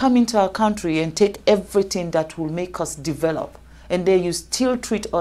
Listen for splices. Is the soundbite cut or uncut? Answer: uncut